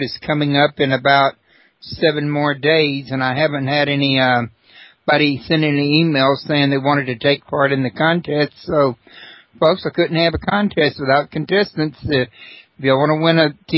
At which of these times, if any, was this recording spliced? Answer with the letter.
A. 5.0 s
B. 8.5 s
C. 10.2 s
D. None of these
B